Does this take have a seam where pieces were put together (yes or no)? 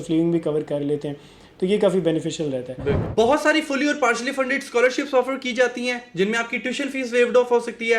yes